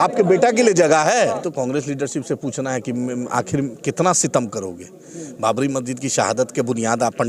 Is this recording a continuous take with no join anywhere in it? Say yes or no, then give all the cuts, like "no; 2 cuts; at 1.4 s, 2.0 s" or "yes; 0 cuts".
no; 1 cut; at 1.4 s